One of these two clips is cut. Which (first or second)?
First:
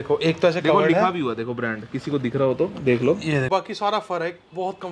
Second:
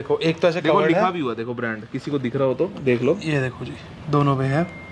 first